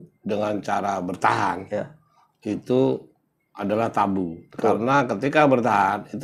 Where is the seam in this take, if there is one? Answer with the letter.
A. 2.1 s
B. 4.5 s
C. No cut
C